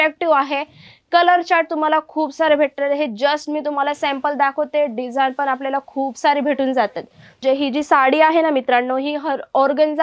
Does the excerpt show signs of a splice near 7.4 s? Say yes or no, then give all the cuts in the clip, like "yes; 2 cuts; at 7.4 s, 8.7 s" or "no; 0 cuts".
yes; 1 cut; at 7.4 s